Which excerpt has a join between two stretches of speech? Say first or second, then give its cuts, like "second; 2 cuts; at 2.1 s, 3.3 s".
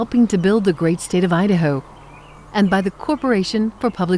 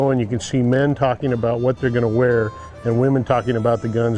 second; 1 cut; at 2.6 s